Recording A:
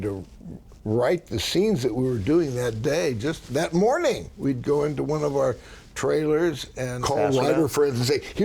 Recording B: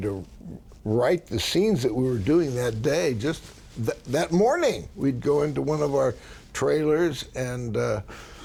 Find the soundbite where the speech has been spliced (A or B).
A